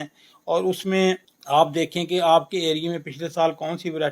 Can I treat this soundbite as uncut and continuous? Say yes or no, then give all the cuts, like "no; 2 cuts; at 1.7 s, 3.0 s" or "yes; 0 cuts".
no; 1 cut; at 1.3 s